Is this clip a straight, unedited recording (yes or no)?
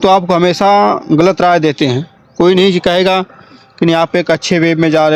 yes